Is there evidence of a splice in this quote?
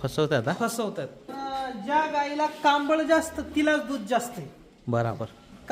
yes; 1 cut; at 1.3 s

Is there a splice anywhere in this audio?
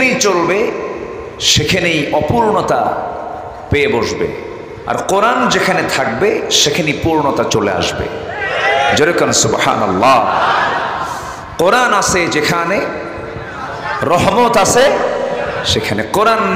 no; 0 cuts

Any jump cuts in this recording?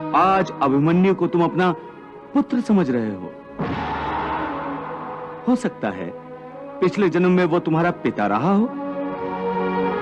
no; 0 cuts

